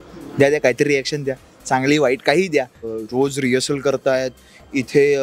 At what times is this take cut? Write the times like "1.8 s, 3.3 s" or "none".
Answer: 2.9 s